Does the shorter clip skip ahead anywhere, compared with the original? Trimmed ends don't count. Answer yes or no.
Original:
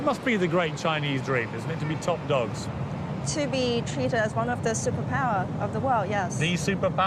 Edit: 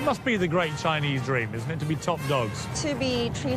yes